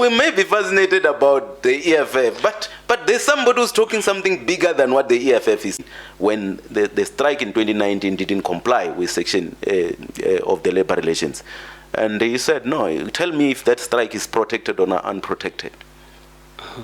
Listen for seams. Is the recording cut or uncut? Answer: cut